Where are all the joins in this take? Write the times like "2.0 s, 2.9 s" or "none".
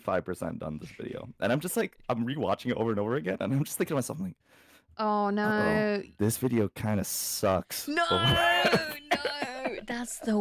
none